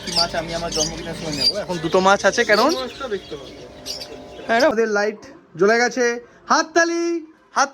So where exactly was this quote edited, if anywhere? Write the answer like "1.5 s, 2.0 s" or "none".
4.7 s